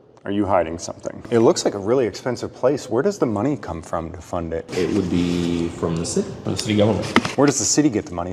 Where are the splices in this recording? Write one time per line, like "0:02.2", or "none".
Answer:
0:01.3
0:04.7
0:06.4